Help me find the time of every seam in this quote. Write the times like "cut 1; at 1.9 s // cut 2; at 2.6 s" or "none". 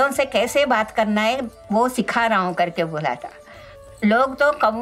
cut 1; at 3.7 s